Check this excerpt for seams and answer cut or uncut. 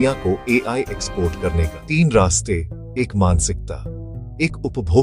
cut